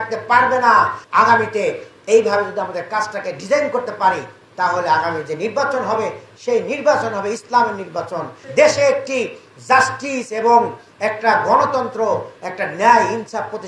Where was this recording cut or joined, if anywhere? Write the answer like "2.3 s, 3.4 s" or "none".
1.0 s, 8.4 s